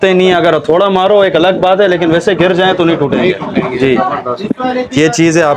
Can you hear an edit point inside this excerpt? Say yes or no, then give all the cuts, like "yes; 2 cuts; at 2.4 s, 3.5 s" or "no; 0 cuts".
no; 0 cuts